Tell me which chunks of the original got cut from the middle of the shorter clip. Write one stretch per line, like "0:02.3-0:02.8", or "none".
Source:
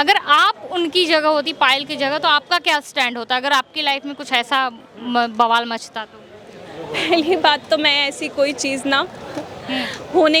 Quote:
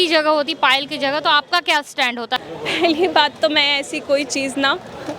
0:03.4-0:06.7